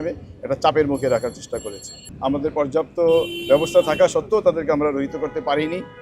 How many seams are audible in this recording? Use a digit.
1